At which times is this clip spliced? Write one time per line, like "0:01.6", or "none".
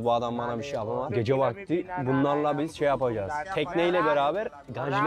0:01.1
0:03.4